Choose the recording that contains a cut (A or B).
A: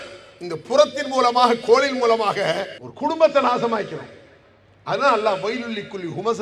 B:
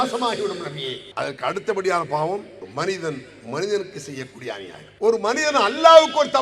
B